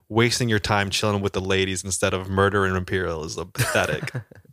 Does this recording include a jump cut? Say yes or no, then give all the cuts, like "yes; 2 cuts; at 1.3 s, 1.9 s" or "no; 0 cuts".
no; 0 cuts